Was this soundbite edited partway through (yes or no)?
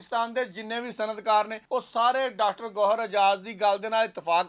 yes